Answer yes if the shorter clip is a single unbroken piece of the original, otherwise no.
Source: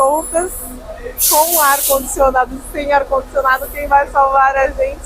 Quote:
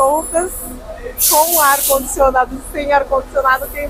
yes